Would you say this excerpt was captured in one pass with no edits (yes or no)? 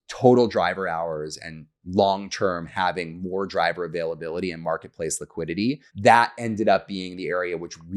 no